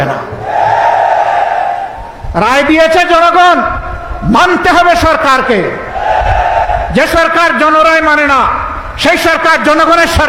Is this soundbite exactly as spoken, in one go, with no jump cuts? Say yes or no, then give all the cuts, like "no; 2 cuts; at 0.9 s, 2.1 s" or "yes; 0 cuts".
yes; 0 cuts